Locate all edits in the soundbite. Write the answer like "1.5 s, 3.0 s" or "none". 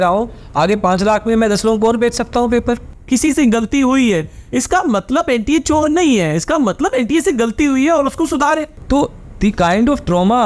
2.9 s, 8.8 s